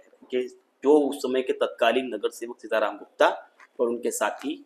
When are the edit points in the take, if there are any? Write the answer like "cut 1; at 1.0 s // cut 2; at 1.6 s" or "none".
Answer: none